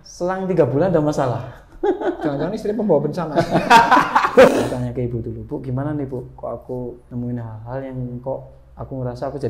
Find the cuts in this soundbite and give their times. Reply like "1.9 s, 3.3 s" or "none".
4.5 s, 7.0 s